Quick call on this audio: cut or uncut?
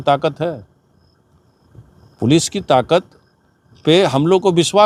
uncut